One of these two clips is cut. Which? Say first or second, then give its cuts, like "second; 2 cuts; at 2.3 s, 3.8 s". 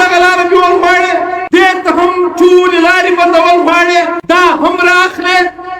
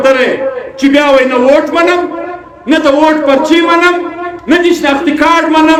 first; 2 cuts; at 1.4 s, 4.2 s